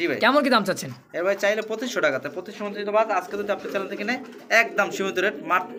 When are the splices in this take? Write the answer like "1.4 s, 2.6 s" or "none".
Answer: none

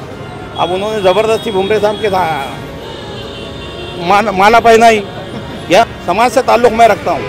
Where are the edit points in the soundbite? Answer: 6.0 s

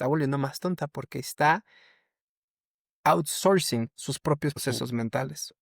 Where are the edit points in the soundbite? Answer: 4.6 s

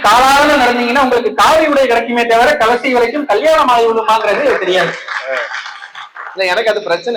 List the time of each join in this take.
none

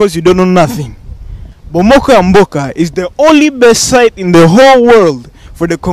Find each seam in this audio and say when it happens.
none

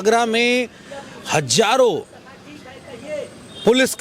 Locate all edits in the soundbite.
none

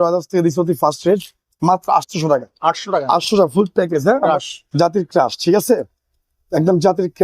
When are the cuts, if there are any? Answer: 4.3 s

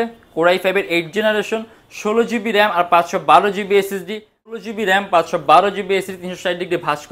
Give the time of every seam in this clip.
4.6 s

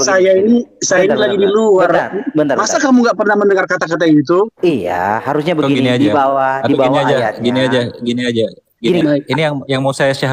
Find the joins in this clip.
9.0 s

